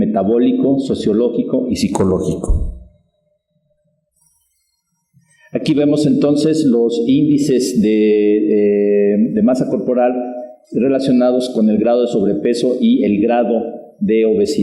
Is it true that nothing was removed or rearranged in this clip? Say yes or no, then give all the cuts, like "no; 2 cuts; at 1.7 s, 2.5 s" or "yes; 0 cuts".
no; 1 cut; at 9.1 s